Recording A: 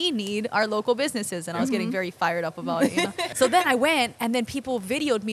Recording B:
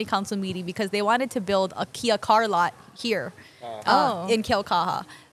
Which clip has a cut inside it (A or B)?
A